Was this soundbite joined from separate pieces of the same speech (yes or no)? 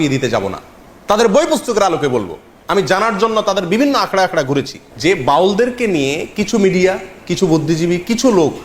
yes